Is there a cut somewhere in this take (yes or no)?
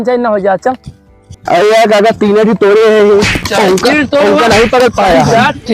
yes